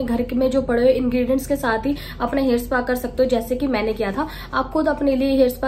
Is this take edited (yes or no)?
no